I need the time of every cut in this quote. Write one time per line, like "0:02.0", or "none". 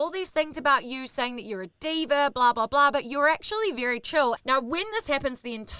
0:04.4